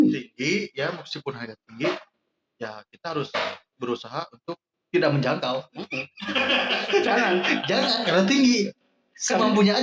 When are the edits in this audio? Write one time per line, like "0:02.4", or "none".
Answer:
none